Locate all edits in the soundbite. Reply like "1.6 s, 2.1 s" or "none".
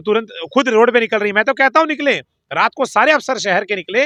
none